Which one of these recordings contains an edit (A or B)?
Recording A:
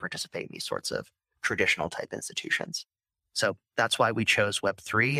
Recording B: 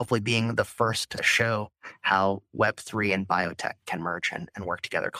B